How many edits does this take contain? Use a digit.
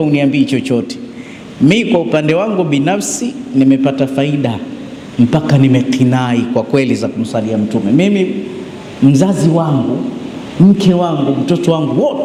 0